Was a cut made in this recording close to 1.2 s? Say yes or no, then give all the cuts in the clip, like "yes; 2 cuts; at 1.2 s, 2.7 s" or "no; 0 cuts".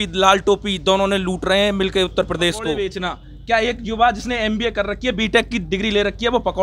no; 1 cut; at 2.8 s